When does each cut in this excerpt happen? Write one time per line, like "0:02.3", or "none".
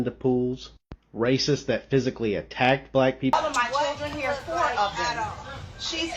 0:03.3

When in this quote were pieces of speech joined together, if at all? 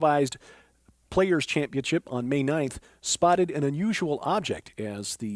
0:01.5

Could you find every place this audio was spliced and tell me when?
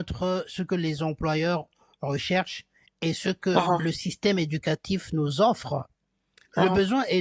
none

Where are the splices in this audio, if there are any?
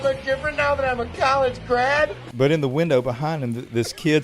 0:02.2

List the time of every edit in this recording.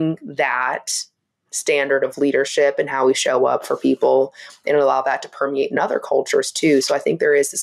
none

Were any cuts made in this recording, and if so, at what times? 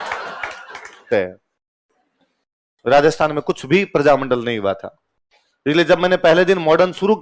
0:01.1

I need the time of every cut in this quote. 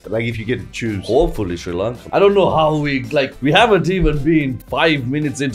0:02.0
0:03.3
0:04.6

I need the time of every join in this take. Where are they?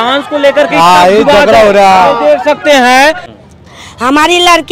0:03.3

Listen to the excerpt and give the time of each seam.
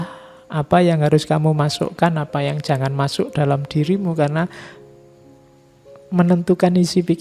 none

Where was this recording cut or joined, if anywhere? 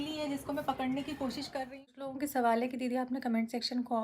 0:02.1

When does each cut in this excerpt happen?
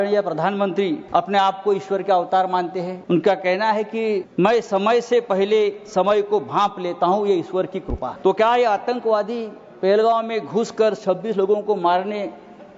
0:01.0
0:02.9
0:04.3
0:08.1

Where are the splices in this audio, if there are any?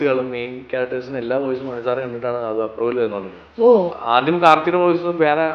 0:04.0

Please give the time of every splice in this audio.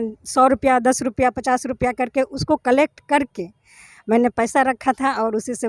none

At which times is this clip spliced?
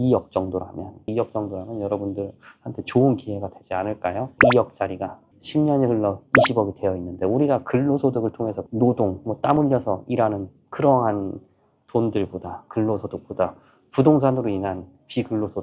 0:01.0
0:04.3

